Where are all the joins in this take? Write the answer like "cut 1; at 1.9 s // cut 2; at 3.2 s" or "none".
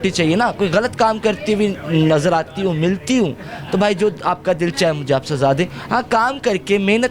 none